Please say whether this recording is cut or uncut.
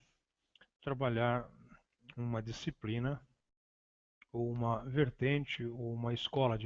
uncut